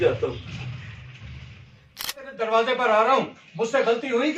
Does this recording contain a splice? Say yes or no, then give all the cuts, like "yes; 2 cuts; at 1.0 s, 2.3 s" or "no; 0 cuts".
yes; 1 cut; at 1.7 s